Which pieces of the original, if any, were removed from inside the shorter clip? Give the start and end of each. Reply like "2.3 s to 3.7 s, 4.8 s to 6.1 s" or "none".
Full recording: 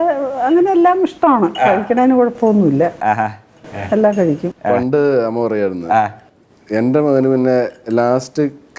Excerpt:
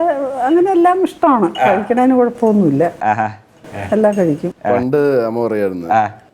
none